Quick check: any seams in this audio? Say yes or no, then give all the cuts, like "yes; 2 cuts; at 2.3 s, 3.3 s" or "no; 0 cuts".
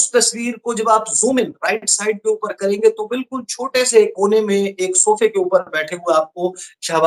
no; 0 cuts